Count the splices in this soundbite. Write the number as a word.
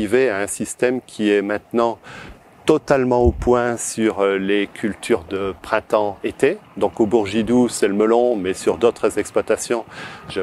zero